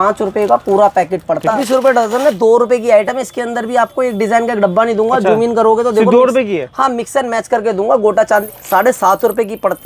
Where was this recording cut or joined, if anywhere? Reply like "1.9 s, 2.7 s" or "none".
1.5 s, 8.5 s